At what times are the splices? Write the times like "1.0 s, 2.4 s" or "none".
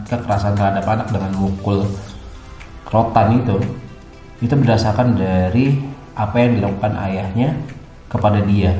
none